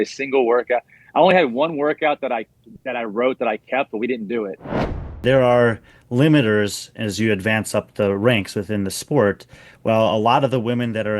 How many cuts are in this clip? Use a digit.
1